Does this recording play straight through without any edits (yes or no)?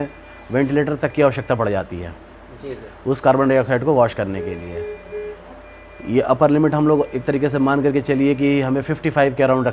yes